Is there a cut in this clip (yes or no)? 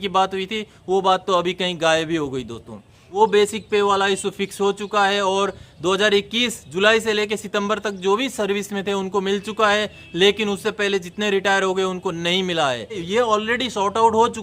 yes